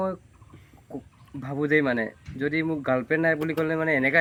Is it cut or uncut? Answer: uncut